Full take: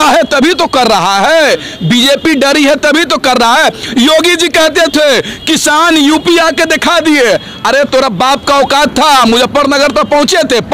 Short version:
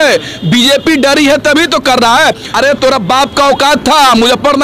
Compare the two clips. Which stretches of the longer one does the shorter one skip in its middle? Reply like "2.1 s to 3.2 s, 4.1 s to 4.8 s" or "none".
3.8 s to 7.5 s

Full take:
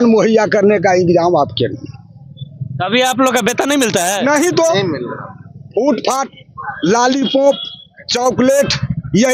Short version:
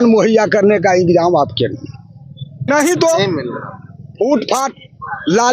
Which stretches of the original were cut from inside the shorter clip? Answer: 2.6 s to 4.2 s

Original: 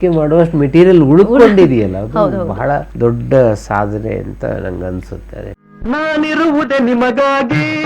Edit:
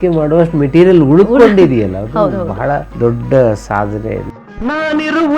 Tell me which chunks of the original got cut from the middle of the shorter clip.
4.3 s to 5.6 s

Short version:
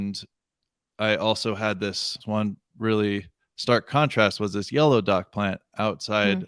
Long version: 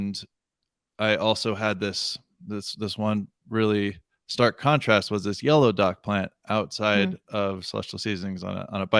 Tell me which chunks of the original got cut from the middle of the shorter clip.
2.2 s to 2.9 s

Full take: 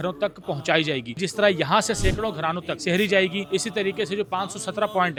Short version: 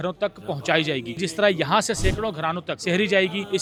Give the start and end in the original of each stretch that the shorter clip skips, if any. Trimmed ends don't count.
none

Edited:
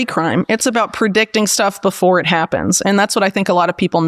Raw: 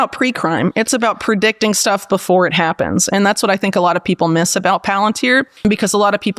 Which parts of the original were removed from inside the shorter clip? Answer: none

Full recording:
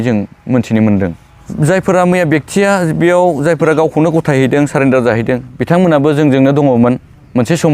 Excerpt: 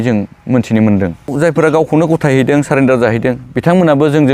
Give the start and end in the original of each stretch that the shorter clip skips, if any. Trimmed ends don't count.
1.3 s to 3.4 s

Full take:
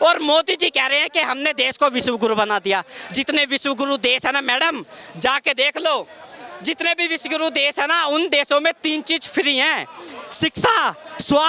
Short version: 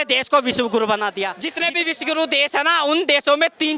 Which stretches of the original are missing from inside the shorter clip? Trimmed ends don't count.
2.9 s to 6.7 s

